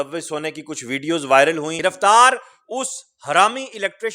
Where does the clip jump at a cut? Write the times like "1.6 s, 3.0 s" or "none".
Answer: 1.7 s

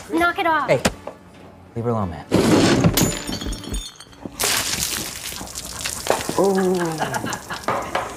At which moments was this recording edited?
none

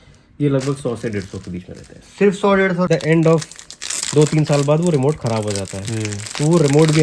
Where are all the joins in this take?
2.9 s

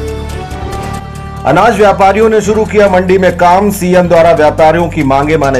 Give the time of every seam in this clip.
none

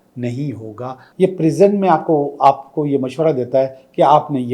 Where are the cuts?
1.0 s

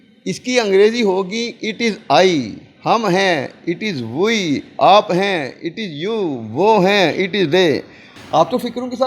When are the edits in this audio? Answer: 8.2 s

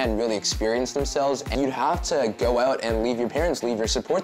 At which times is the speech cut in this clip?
1.5 s

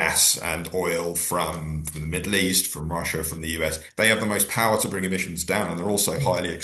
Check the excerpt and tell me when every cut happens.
3.8 s

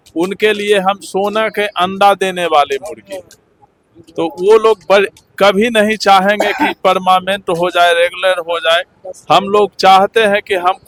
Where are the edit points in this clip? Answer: none

